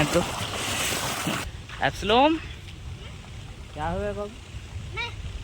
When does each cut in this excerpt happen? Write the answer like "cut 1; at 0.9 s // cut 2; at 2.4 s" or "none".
cut 1; at 1.4 s